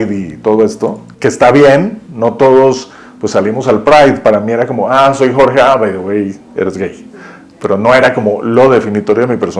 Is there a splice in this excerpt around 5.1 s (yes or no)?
no